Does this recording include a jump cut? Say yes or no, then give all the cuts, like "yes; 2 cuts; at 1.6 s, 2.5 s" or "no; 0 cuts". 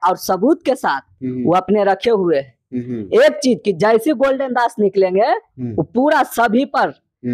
no; 0 cuts